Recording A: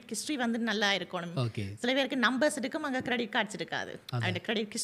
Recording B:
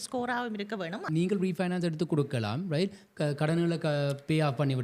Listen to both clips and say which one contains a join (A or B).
B